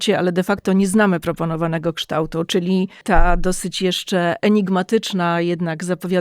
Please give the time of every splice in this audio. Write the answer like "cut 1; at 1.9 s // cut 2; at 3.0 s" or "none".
cut 1; at 3.0 s